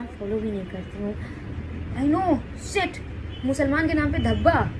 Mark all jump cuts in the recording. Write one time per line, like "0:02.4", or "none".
none